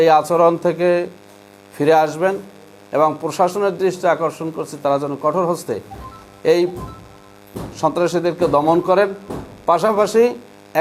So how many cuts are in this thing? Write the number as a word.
zero